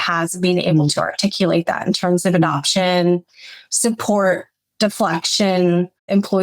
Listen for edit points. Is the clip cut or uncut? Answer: uncut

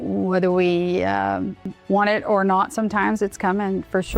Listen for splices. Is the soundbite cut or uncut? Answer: cut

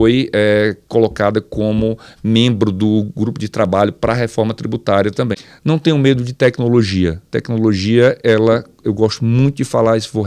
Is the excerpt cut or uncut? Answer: cut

